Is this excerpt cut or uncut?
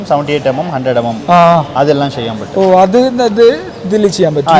uncut